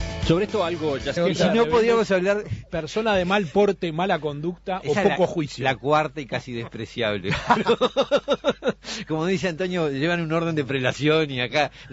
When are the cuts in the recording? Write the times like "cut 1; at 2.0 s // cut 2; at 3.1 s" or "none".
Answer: none